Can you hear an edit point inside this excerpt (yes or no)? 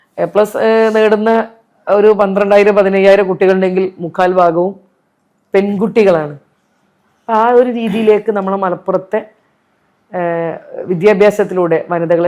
no